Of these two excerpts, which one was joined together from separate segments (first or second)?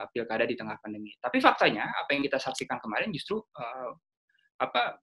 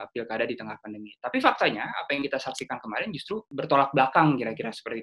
second